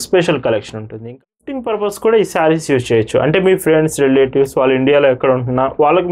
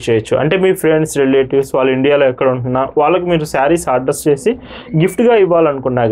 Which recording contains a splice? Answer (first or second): first